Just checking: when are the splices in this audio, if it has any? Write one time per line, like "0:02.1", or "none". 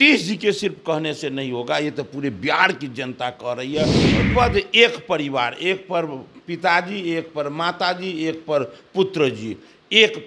0:04.2